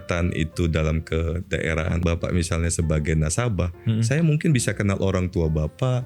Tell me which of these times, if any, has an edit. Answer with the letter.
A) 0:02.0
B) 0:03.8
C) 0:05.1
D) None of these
A